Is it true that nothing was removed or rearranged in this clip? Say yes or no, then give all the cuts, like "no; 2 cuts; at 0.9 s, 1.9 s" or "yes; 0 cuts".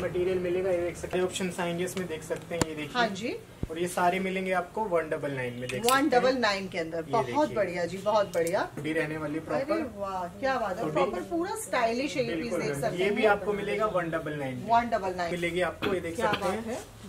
no; 3 cuts; at 1.1 s, 8.8 s, 15.3 s